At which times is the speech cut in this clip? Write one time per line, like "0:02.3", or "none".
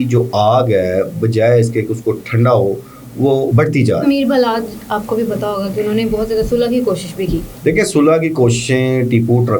0:04.0
0:07.5